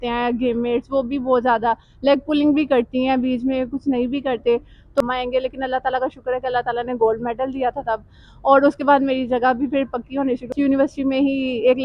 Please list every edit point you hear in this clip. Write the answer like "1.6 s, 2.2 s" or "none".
5.0 s, 10.5 s